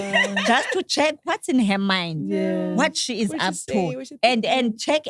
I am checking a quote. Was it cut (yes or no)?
no